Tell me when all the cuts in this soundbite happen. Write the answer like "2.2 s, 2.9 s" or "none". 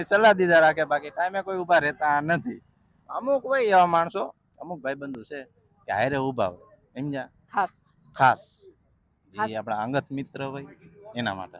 none